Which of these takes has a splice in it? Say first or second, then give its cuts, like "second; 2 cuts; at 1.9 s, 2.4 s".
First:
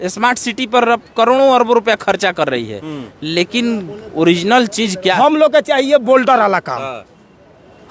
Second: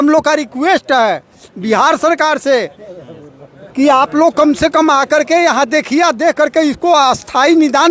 first; 1 cut; at 5.1 s